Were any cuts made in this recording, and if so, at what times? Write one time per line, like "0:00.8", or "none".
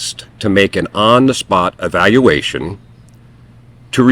0:01.8